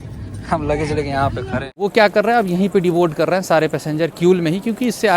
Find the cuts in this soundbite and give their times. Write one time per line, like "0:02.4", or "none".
0:01.9

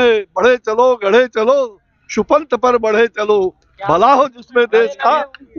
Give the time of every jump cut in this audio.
none

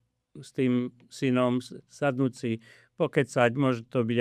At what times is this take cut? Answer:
none

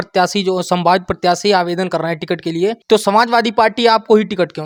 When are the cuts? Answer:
none

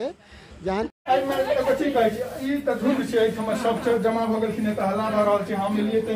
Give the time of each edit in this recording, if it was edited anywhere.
0:01.0

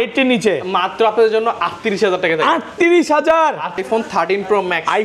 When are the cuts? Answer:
0:03.8

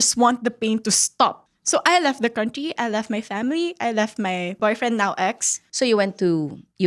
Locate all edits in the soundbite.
0:04.6
0:05.6

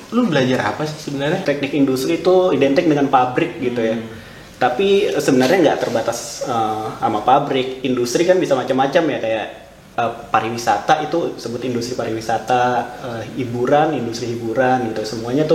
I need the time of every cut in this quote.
0:01.4

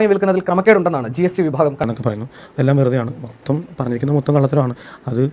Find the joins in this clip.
0:01.9

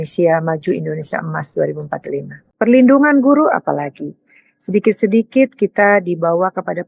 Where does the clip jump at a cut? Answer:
0:02.4

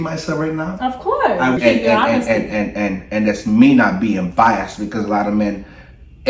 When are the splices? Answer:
0:01.6

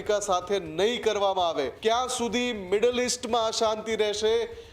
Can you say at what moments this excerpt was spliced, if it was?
0:01.7

